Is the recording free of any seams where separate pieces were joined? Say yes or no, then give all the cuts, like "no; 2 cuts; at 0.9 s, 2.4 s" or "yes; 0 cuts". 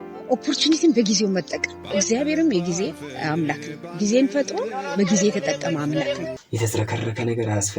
no; 1 cut; at 6.4 s